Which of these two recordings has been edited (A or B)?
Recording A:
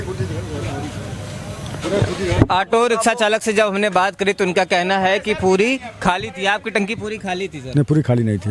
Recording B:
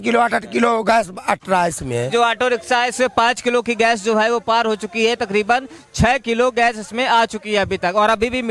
B